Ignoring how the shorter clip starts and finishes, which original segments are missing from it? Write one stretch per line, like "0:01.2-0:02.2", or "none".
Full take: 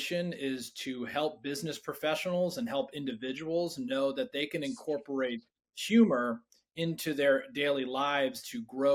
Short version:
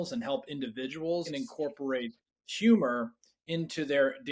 0:03.7-0:04.6